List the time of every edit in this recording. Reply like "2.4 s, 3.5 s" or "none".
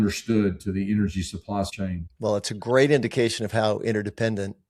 1.8 s